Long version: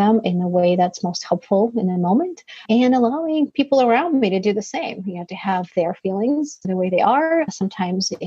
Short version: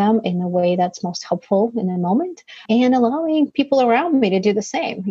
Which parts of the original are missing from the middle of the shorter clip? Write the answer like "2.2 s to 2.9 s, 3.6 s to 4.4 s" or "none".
none